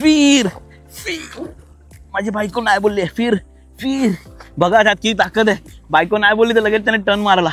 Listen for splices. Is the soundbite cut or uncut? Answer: uncut